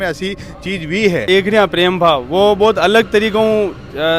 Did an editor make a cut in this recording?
yes; 1 cut; at 1.3 s

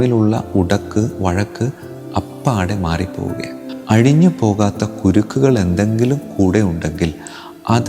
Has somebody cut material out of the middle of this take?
yes; 1 cut; at 3.6 s

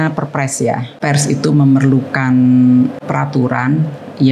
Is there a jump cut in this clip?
yes; 2 cuts; at 0.9 s, 3.0 s

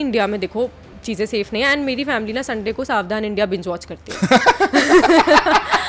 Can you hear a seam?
yes; 1 cut; at 1.0 s

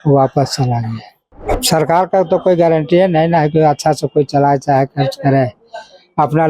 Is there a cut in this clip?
yes; 1 cut; at 1.5 s

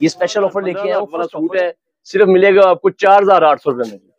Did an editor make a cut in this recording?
yes; 1 cut; at 1.3 s

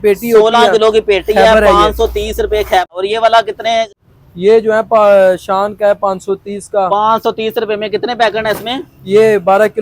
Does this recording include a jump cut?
yes; 2 cuts; at 2.9 s, 4.0 s

